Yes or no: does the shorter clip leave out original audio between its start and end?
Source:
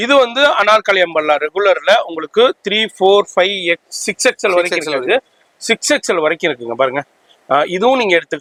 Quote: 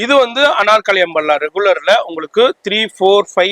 no